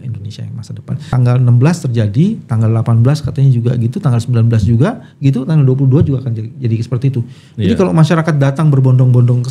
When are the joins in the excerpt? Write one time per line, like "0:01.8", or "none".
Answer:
0:01.1